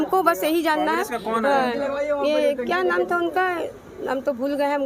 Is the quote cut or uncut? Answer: uncut